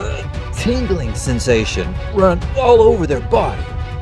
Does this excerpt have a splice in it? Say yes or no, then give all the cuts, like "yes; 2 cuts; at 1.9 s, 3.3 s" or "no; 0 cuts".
no; 0 cuts